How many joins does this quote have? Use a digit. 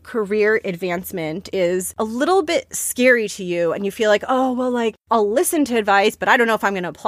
2